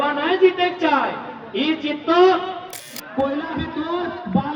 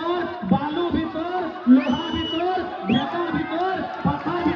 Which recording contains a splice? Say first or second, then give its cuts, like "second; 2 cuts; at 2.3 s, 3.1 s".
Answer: first; 1 cut; at 2.9 s